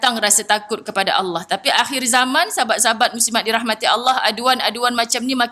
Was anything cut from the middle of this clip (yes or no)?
no